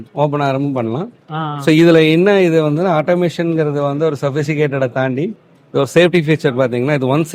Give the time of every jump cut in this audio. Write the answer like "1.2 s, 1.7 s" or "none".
none